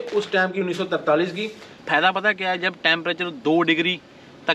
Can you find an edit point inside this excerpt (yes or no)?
yes